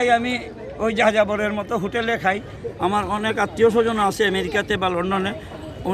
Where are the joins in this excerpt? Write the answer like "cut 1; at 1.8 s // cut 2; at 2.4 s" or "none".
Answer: cut 1; at 2.6 s